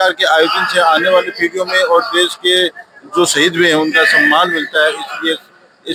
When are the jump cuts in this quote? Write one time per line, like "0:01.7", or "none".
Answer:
none